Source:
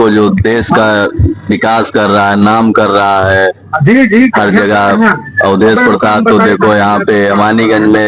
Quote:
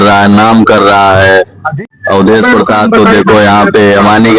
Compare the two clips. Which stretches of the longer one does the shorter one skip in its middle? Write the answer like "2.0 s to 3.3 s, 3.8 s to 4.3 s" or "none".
3.8 s to 5.1 s